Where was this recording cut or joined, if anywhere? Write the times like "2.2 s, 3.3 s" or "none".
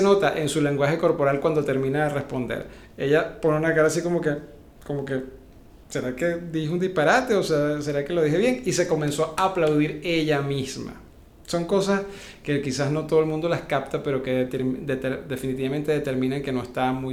none

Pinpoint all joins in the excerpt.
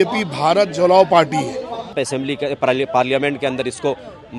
2.0 s

